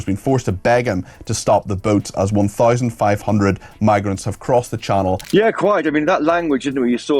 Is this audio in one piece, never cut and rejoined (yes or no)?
no